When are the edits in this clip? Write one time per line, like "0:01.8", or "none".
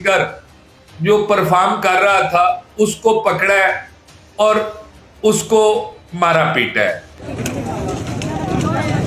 0:07.1